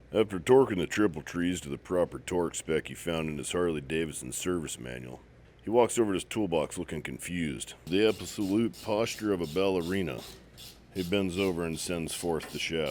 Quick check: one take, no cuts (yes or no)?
no